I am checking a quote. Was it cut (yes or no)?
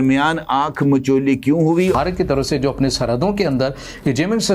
yes